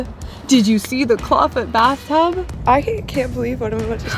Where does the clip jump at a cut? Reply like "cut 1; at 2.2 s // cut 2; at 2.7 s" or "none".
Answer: cut 1; at 2.5 s